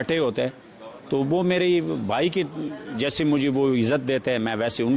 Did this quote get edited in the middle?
no; 0 cuts

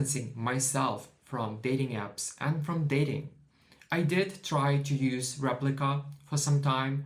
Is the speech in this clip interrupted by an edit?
no; 0 cuts

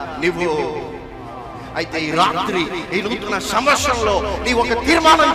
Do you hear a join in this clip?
yes; 1 cut; at 1.6 s

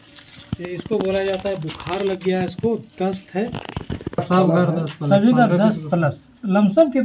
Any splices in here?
yes; 1 cut; at 4.2 s

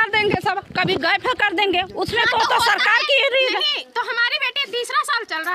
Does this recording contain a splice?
no; 0 cuts

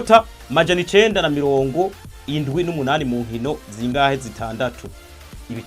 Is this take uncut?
yes; 0 cuts

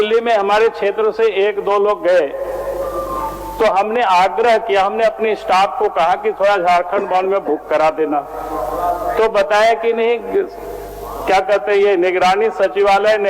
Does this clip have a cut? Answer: no; 0 cuts

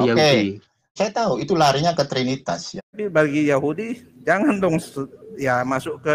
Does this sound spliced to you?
yes; 2 cuts; at 0.9 s, 3.0 s

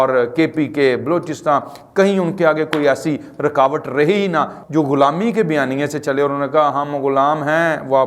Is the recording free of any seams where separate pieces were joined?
no; 1 cut; at 4.6 s

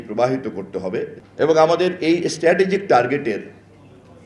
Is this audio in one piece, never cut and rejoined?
no; 1 cut; at 1.2 s

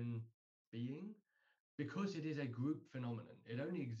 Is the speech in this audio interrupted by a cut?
yes; 1 cut; at 1.5 s

